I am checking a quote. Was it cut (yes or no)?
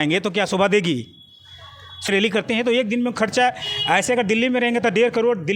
yes